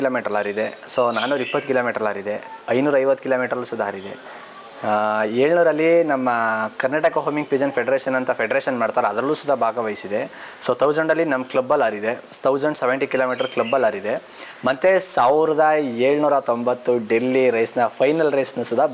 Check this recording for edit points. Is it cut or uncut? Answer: uncut